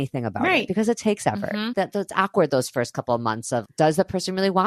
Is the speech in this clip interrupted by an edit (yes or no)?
yes